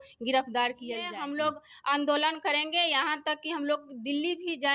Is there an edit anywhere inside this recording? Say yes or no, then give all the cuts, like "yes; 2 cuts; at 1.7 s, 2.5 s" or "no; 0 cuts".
yes; 1 cut; at 1.1 s